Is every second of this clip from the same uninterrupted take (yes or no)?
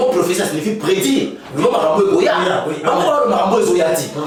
yes